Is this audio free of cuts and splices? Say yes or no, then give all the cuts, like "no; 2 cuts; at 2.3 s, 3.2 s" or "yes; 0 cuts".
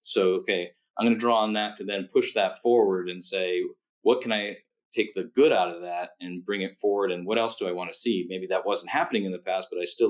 yes; 0 cuts